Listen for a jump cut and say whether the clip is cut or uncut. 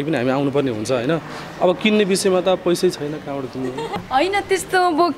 cut